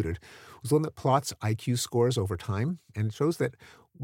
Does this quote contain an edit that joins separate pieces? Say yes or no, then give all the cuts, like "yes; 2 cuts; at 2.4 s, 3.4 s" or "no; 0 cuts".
yes; 1 cut; at 2.9 s